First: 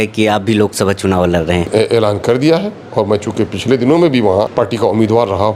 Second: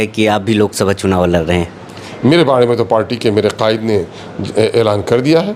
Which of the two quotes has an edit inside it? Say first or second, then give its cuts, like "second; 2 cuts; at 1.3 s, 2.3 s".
first; 2 cuts; at 1.7 s, 4.5 s